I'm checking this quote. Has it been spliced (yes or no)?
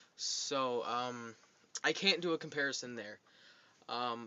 no